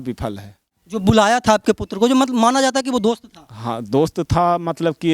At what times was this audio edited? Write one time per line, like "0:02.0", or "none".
0:01.0